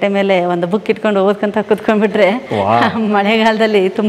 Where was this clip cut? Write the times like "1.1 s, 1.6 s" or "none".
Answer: none

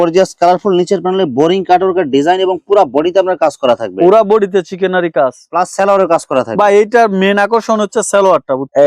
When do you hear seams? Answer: none

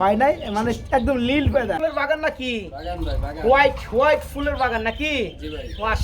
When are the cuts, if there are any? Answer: 1.8 s

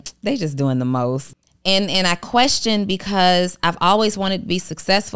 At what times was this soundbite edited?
1.3 s

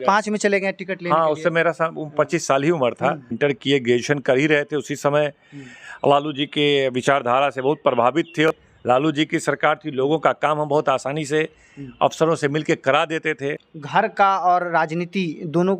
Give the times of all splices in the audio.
3.3 s, 8.5 s, 13.7 s

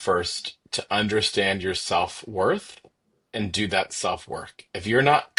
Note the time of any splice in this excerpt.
none

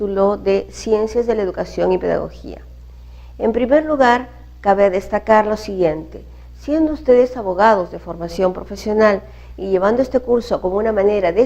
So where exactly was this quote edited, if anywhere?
3.7 s

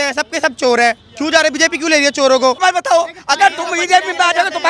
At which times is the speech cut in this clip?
2.6 s

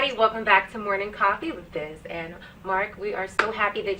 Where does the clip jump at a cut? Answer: none

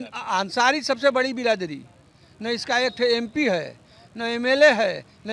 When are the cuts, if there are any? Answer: none

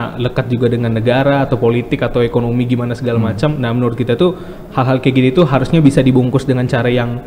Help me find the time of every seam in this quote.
none

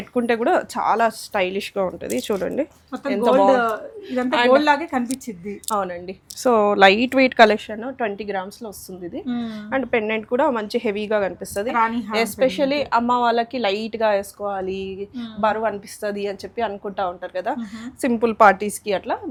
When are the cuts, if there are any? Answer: none

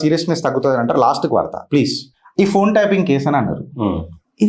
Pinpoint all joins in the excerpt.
2.1 s

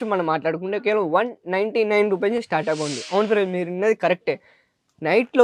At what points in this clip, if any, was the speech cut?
none

